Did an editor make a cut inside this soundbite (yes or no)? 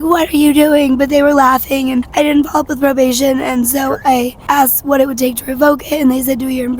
yes